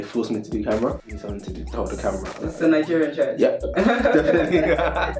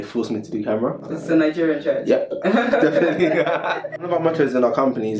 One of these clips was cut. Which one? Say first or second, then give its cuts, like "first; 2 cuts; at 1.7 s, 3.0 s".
second; 2 cuts; at 1.1 s, 4.0 s